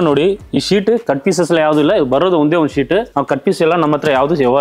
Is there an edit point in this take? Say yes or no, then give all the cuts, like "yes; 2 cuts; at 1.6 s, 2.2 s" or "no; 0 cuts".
no; 0 cuts